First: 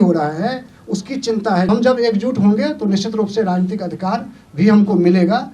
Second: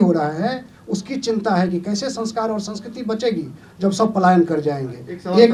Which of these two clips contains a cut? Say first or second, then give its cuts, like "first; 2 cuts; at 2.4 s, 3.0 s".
first; 1 cut; at 1.7 s